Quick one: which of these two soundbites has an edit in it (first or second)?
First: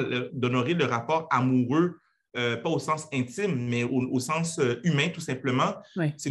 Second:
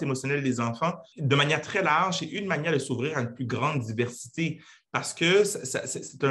second